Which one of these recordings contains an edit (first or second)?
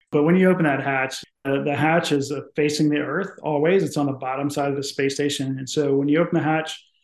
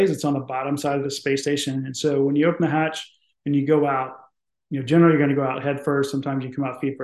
first